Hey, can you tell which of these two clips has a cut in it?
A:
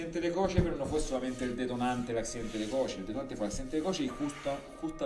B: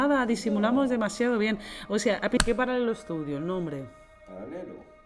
B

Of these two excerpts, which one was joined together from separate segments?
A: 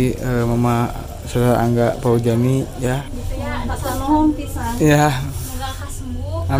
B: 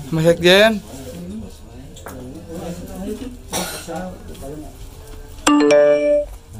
A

